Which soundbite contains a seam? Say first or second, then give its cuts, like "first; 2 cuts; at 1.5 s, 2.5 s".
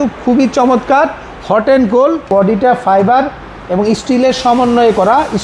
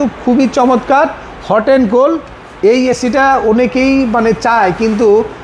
first; 1 cut; at 2.3 s